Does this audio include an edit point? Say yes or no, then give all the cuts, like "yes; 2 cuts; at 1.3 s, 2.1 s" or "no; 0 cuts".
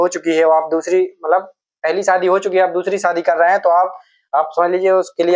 no; 0 cuts